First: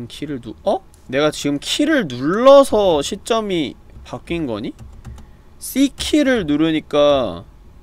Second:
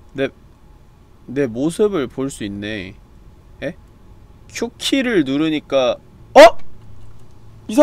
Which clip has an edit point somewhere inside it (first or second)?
first